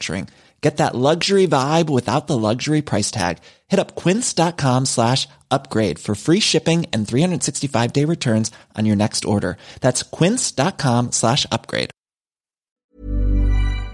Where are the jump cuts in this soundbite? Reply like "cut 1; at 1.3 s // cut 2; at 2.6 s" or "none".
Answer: cut 1; at 12.8 s